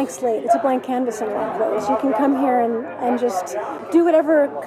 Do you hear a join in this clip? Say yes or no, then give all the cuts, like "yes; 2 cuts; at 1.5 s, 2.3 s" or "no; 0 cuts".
yes; 1 cut; at 3.8 s